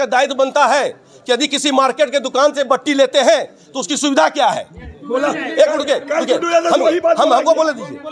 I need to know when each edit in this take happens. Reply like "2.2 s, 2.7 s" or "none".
none